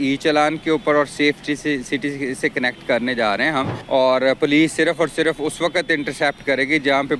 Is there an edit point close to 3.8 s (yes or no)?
yes